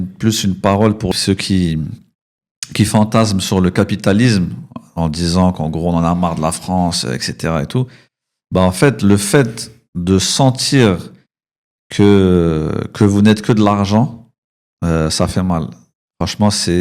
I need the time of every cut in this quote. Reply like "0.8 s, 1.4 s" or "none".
1.1 s